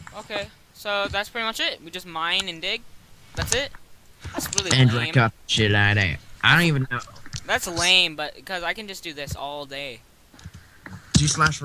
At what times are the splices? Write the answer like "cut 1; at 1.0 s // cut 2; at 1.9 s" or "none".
cut 1; at 3.3 s